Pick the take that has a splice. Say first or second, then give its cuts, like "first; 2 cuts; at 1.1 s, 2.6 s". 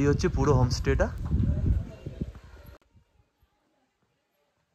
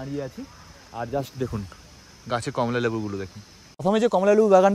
second; 1 cut; at 3.8 s